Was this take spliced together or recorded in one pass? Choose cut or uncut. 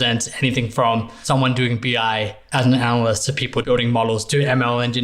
cut